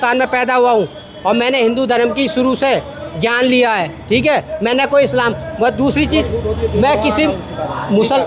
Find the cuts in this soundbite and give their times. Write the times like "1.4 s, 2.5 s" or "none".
none